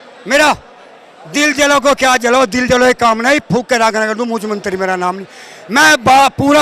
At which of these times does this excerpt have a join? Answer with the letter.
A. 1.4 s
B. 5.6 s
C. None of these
C